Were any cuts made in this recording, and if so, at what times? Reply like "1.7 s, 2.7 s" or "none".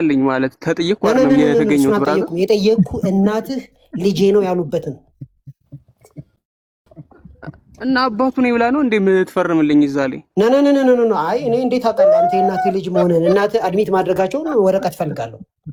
none